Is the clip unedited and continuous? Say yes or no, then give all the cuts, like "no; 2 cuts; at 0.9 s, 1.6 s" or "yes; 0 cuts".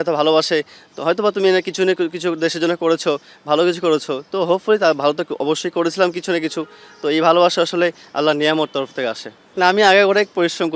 yes; 0 cuts